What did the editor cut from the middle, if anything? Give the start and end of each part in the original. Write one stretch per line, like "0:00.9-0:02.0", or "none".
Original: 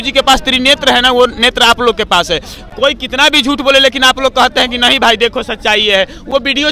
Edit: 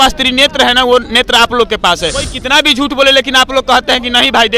0:02.6-0:03.0